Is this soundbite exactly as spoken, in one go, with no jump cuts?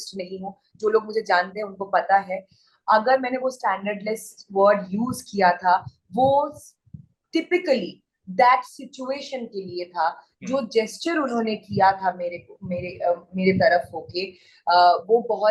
yes; 0 cuts

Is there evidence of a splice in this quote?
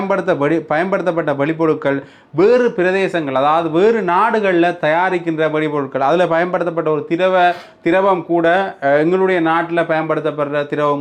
no; 0 cuts

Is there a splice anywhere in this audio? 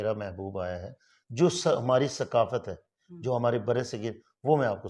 no; 0 cuts

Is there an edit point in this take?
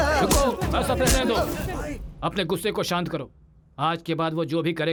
no; 0 cuts

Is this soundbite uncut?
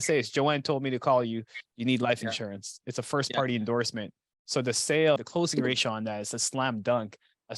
no; 1 cut; at 5.2 s

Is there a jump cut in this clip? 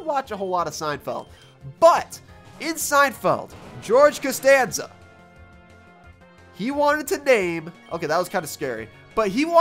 no; 0 cuts

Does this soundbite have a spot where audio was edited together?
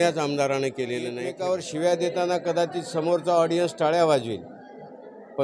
yes; 1 cut; at 1.3 s

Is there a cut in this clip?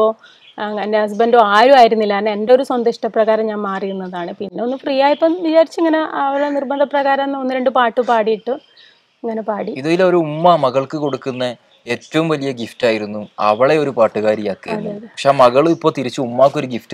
no; 0 cuts

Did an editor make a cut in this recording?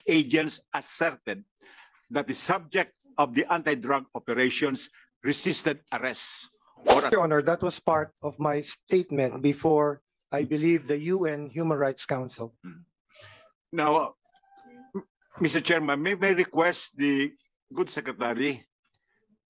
yes; 1 cut; at 7.1 s

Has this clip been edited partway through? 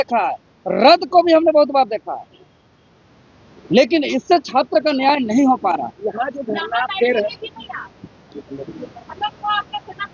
no; 0 cuts

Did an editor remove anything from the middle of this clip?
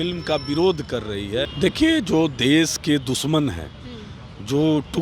yes; 1 cut; at 1.5 s

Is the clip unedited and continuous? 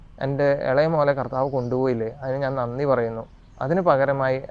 yes; 0 cuts

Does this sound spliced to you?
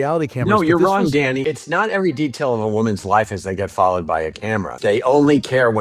yes; 2 cuts; at 1.4 s, 4.7 s

